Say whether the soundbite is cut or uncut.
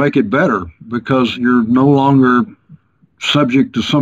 cut